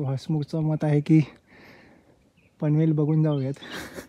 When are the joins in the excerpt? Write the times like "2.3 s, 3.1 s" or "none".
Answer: none